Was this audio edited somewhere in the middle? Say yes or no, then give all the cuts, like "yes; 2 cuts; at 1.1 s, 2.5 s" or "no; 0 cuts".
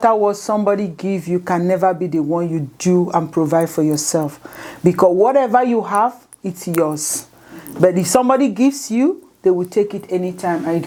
no; 0 cuts